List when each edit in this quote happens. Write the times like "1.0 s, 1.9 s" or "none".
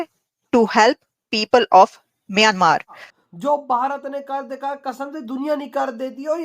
3.1 s